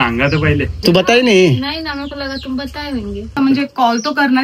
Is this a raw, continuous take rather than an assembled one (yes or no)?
no